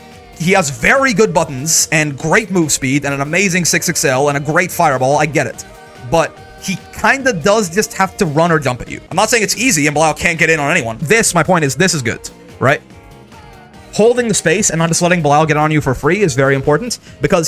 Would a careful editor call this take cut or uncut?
cut